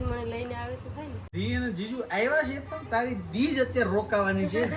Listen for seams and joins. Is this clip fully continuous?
no; 1 cut; at 1.2 s

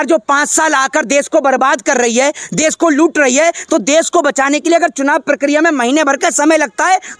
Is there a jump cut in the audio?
no; 0 cuts

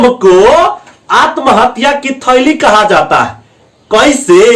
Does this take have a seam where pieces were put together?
no; 0 cuts

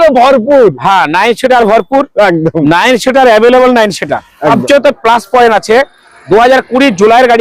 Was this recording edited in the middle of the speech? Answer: yes; 1 cut; at 4.5 s

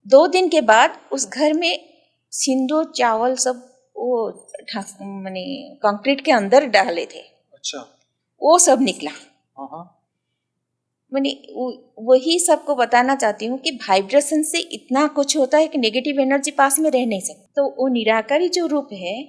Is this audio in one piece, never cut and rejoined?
no; 1 cut; at 17.4 s

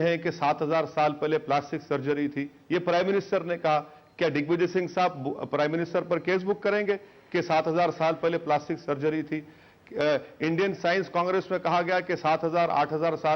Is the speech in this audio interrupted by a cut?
yes; 1 cut; at 5.4 s

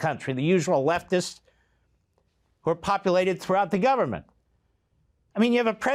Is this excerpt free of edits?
yes; 0 cuts

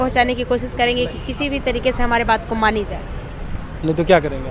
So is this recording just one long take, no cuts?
yes; 0 cuts

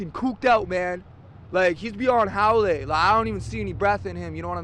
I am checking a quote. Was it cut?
no; 0 cuts

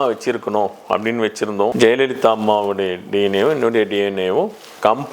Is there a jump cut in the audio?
yes; 1 cut; at 1.7 s

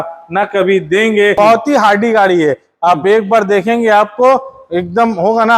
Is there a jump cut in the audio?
yes; 1 cut; at 1.4 s

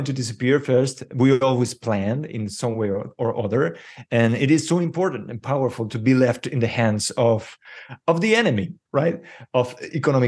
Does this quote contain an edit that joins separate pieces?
no; 0 cuts

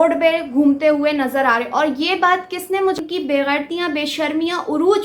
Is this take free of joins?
no; 1 cut; at 3.0 s

